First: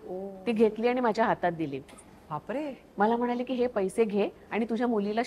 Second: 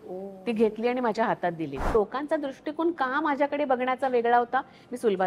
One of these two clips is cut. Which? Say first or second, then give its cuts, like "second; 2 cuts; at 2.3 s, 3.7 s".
second; 1 cut; at 1.9 s